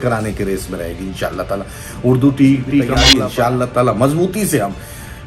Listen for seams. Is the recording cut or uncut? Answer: cut